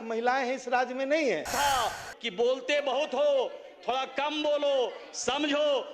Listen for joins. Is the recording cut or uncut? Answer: cut